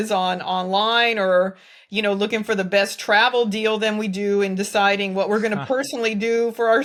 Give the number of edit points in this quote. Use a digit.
0